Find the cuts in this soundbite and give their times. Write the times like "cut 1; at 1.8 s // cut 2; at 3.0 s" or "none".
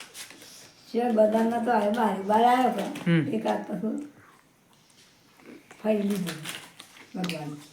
none